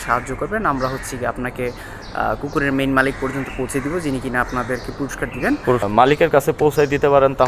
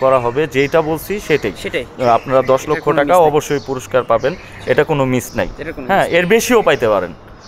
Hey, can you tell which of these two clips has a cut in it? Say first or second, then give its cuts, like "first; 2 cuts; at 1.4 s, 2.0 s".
first; 1 cut; at 5.8 s